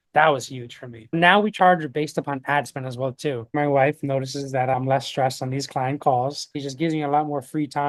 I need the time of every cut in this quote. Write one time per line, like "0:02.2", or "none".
none